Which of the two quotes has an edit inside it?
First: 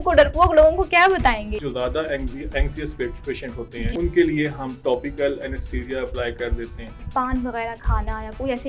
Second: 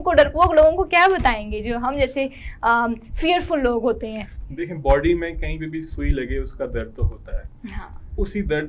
first; 3 cuts; at 1.6 s, 3.9 s, 7.1 s

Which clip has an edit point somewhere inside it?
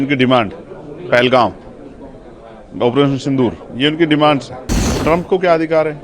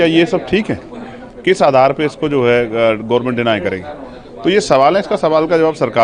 first; 1 cut; at 4.9 s

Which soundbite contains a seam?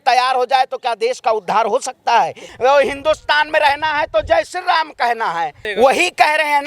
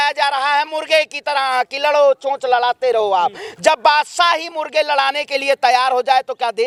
first; 2 cuts; at 2.4 s, 5.6 s

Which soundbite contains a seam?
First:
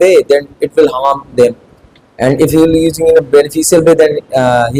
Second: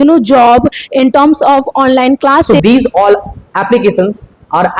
second; 1 cut; at 2.5 s

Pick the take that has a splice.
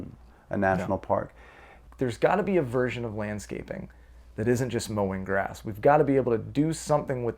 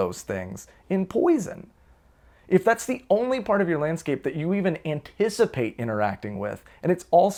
first; 1 cut; at 1.8 s

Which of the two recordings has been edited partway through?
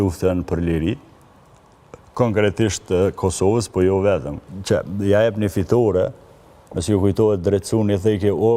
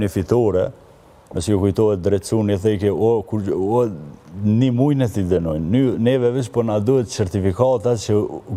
first; 1 cut; at 4.5 s

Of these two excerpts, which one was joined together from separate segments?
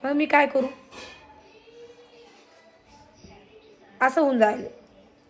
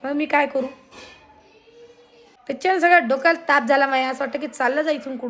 second; 1 cut; at 2.4 s

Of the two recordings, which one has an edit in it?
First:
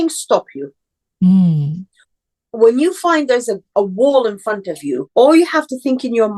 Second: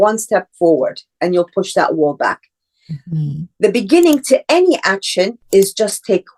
first; 2 cuts; at 3.7 s, 5.0 s

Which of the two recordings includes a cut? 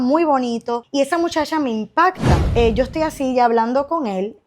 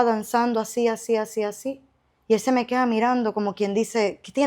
first; 2 cuts; at 0.8 s, 2.3 s

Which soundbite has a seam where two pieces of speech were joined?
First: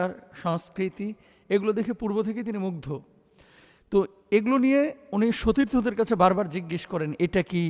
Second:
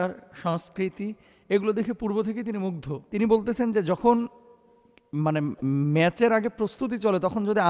second; 1 cut; at 3.1 s

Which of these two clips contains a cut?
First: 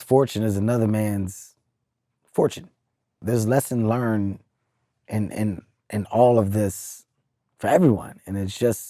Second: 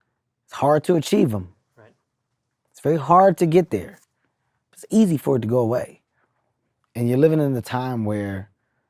first; 1 cut; at 3.2 s

